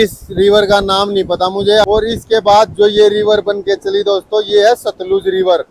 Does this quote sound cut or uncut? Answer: cut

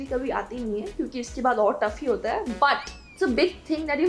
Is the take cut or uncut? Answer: cut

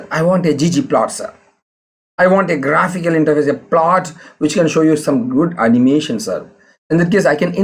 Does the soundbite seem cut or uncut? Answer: uncut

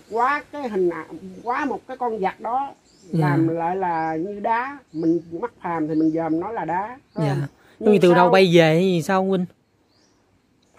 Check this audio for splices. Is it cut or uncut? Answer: uncut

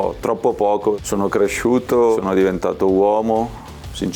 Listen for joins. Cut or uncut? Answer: cut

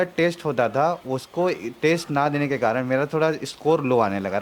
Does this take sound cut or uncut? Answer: uncut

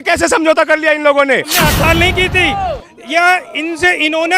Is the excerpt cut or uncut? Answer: cut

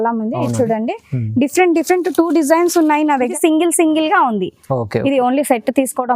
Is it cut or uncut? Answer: cut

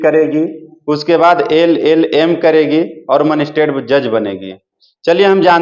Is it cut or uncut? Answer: uncut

